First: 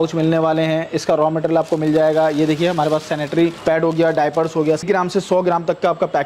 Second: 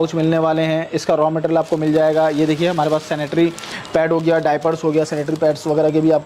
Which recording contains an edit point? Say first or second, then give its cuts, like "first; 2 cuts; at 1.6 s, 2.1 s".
first; 2 cuts; at 3.6 s, 4.8 s